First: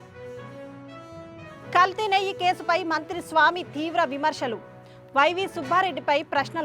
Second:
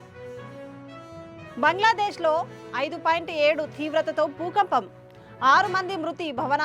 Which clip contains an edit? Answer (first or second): first